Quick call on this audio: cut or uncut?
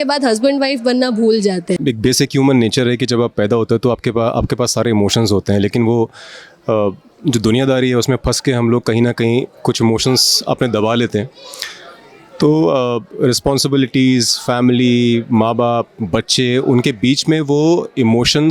cut